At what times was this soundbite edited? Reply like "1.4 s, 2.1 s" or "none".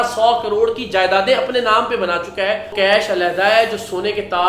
2.7 s